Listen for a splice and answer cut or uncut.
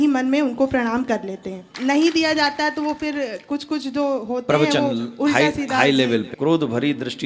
cut